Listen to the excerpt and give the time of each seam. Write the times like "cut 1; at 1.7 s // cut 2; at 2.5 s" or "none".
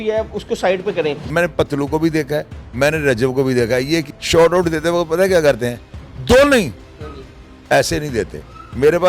cut 1; at 1.3 s // cut 2; at 4.1 s